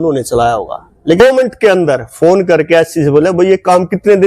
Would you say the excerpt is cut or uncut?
cut